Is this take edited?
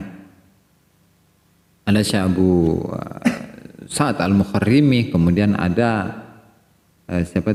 no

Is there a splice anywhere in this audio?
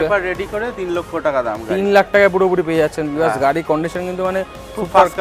no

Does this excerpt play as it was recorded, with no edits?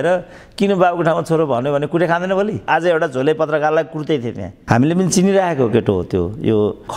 no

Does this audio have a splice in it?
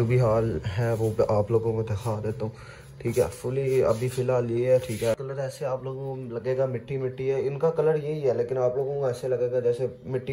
yes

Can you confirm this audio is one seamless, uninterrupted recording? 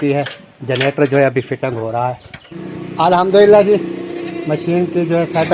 no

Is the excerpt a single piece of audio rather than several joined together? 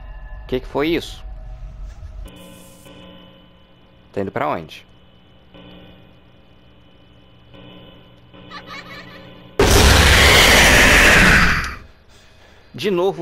no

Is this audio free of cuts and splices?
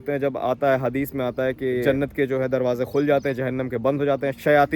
yes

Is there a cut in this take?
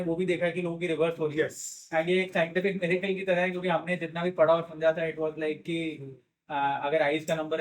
no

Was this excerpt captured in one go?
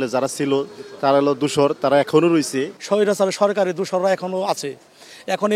yes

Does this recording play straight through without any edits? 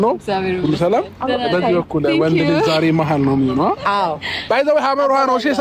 no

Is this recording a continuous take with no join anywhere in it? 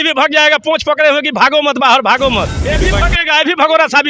no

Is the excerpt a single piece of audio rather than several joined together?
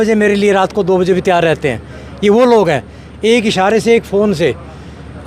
yes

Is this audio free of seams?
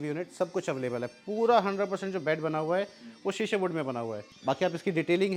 yes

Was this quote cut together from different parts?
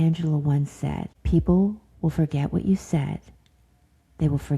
yes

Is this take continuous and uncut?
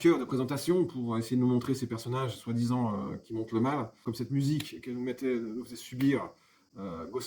no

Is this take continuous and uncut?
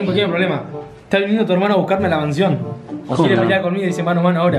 yes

